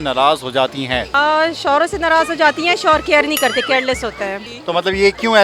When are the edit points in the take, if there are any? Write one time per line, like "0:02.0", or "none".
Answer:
0:01.1
0:04.5